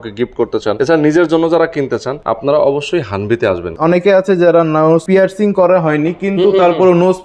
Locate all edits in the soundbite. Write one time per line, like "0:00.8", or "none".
0:00.8
0:02.1
0:03.7
0:05.0